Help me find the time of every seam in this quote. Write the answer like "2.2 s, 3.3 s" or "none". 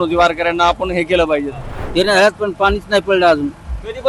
1.7 s